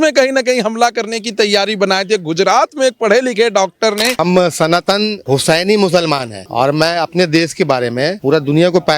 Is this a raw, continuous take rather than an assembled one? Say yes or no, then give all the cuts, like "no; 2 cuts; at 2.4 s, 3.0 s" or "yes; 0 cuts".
no; 4 cuts; at 4.1 s, 5.2 s, 6.4 s, 8.2 s